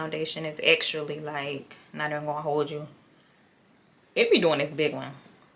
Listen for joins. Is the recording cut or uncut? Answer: uncut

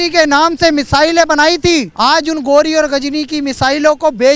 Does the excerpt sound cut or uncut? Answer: cut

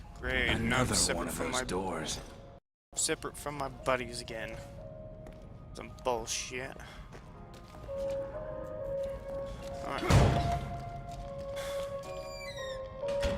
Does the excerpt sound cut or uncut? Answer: cut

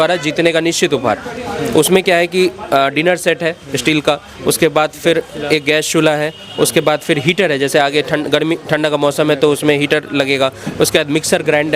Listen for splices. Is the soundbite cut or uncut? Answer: uncut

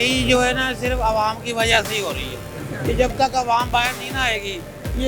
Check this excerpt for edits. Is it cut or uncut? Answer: uncut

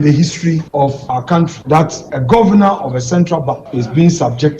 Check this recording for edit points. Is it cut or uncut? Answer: cut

